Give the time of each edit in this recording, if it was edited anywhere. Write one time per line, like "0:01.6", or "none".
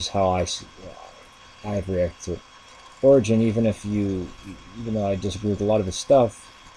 0:02.2